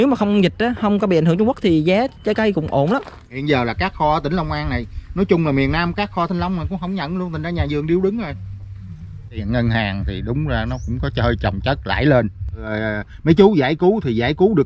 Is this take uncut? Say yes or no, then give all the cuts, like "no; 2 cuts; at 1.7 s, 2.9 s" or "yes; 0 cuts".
no; 3 cuts; at 3.4 s, 9.4 s, 12.7 s